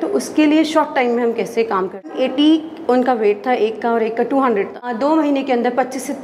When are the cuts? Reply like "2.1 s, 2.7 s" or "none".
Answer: 2.1 s, 4.9 s

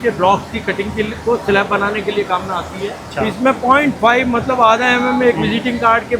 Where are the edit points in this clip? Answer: 3.0 s

